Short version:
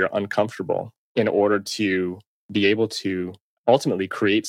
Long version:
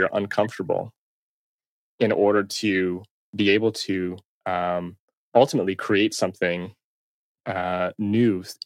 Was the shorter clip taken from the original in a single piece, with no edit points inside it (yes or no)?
no